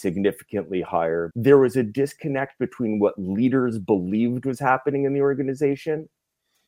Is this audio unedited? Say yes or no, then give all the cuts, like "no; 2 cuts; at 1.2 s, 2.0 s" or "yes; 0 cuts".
no; 1 cut; at 1.3 s